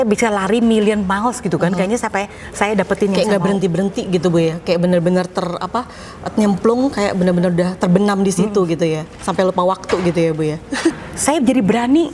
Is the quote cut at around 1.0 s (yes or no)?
no